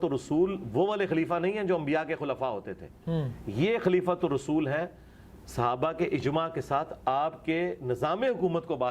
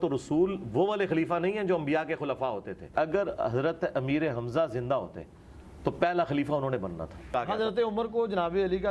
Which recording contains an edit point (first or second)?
second